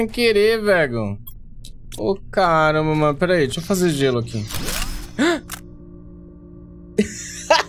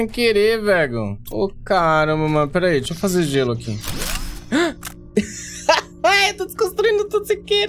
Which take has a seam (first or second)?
second